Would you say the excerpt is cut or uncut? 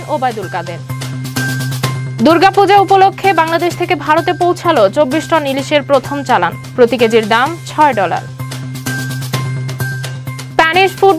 uncut